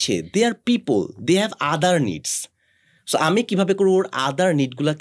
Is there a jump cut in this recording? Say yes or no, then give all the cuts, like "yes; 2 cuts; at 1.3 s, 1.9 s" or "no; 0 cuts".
no; 0 cuts